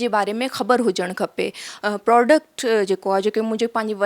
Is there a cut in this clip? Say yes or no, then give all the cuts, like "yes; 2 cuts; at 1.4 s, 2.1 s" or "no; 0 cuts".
yes; 1 cut; at 1.7 s